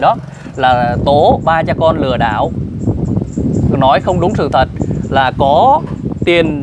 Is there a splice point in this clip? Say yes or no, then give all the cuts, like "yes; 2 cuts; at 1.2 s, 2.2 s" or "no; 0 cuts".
no; 0 cuts